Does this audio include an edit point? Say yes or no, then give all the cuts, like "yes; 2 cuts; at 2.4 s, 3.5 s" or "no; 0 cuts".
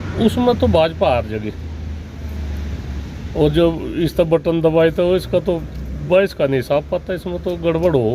no; 0 cuts